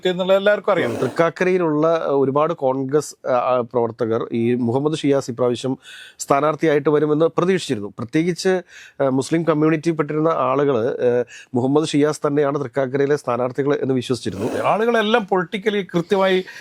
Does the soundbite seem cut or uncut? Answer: cut